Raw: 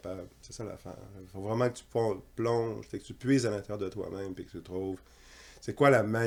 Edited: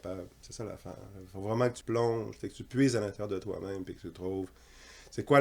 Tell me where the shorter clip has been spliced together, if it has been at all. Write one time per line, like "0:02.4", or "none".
0:01.8